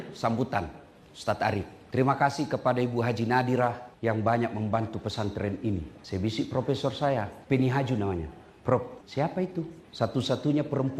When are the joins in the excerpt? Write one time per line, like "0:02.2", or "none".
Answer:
0:01.8
0:03.9
0:05.9
0:07.4
0:09.0
0:09.8